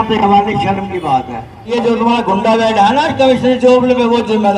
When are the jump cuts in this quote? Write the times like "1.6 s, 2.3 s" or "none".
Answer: 1.7 s